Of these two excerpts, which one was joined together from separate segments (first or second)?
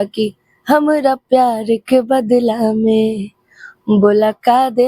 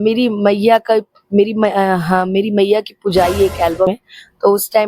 second